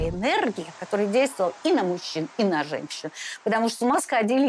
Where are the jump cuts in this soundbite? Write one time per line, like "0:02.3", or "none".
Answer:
none